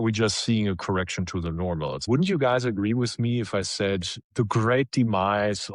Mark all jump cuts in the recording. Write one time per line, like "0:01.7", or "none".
0:02.1